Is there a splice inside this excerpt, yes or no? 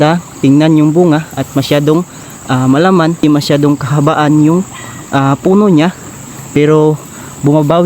yes